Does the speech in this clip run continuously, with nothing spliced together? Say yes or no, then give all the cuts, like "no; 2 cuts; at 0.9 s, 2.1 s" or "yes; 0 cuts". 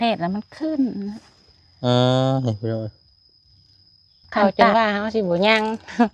no; 1 cut; at 4.7 s